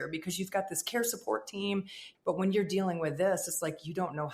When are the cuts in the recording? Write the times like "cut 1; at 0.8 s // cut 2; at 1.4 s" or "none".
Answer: cut 1; at 2.0 s